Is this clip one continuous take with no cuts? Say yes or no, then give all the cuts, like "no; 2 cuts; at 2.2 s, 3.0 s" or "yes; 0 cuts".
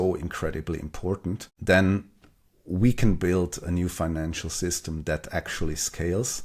no; 1 cut; at 1.5 s